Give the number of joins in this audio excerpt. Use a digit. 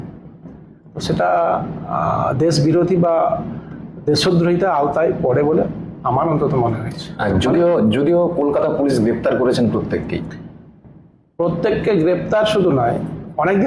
0